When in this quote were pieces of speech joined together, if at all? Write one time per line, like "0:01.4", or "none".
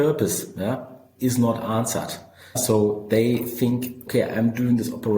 0:01.0
0:02.6
0:04.0